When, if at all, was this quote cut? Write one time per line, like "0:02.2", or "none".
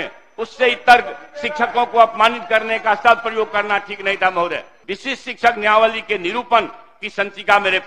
0:04.7

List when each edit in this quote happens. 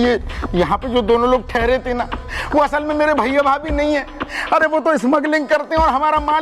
none

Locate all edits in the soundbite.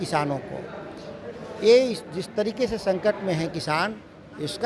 none

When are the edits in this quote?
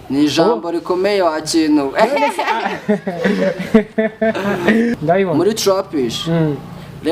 0:04.9

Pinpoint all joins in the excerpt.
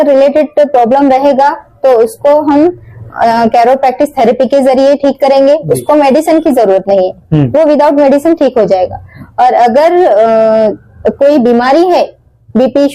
none

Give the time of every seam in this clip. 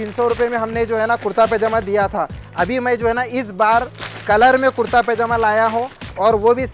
0:02.4

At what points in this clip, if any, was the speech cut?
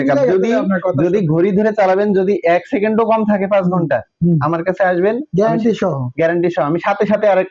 none

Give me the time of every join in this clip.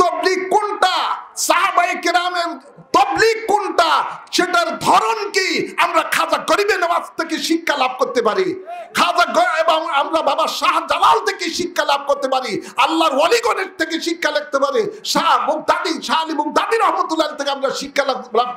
none

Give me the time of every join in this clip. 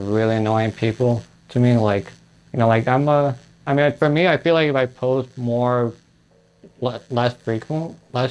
none

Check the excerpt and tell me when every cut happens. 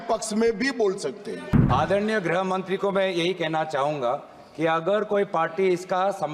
0:01.6

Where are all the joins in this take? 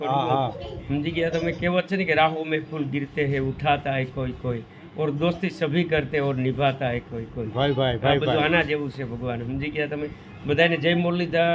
none

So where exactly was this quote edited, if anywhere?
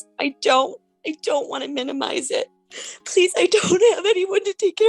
0:02.6

